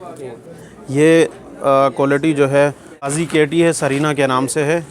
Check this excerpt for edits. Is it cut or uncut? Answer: cut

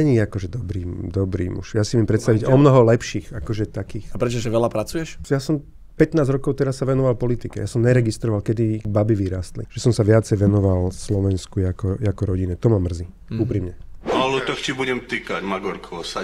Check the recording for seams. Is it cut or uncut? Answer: cut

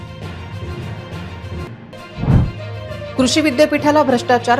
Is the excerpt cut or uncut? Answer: cut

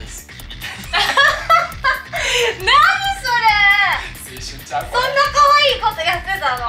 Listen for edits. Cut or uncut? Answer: uncut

